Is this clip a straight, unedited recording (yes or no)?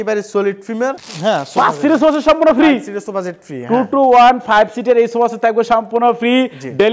yes